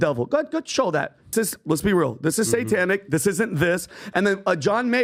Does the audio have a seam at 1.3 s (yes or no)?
yes